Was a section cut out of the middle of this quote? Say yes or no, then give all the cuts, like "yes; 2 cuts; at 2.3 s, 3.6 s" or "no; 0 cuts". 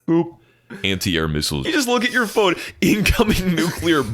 yes; 1 cut; at 1.6 s